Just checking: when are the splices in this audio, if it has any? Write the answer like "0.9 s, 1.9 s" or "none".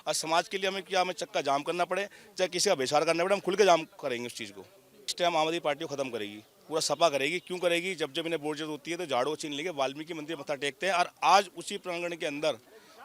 5.0 s